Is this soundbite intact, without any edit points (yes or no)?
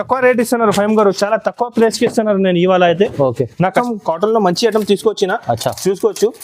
no